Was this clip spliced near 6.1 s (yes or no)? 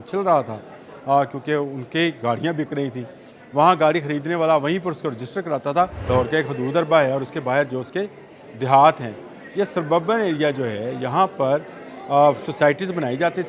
yes